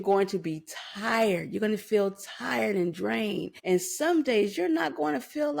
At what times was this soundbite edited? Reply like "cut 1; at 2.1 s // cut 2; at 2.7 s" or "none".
cut 1; at 3.5 s